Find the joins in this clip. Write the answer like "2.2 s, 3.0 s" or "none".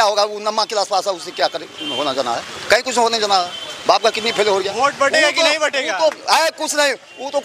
none